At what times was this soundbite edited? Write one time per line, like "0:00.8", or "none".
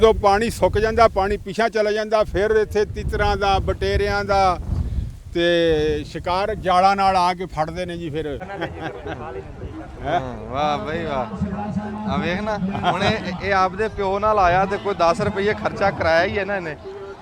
0:08.4